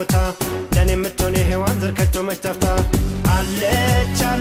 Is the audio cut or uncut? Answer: uncut